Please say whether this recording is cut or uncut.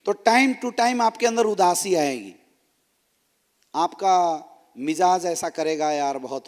uncut